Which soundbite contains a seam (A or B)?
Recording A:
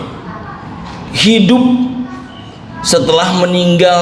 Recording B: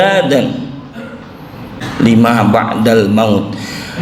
B